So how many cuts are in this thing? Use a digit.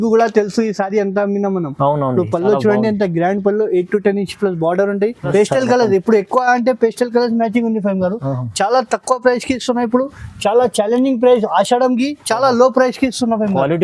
1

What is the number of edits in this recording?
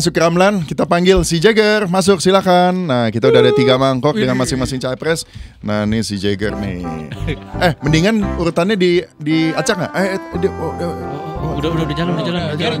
0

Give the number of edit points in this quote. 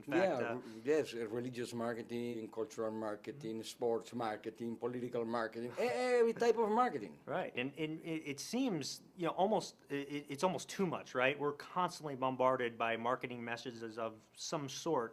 1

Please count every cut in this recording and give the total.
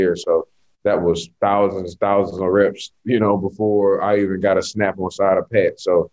0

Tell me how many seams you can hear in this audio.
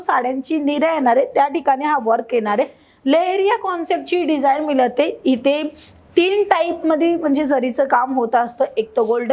0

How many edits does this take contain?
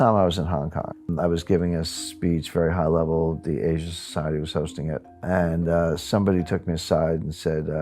2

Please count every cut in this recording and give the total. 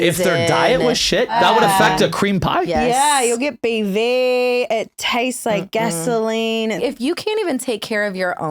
2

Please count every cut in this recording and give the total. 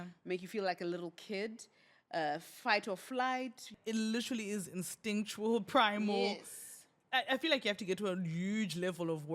1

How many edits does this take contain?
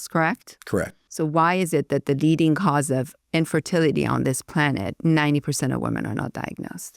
1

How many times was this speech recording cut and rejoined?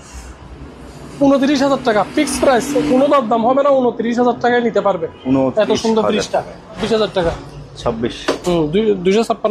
1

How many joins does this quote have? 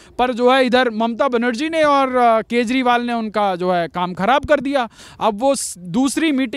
0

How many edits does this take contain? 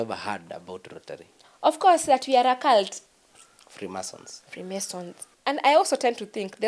2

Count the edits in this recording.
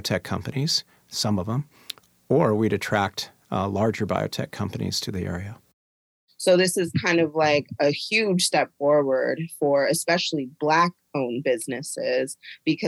1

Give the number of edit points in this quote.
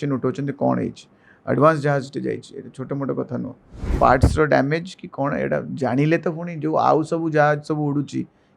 1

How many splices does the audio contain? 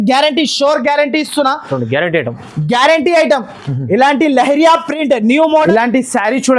1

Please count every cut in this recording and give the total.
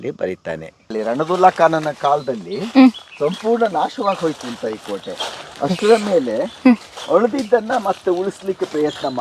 1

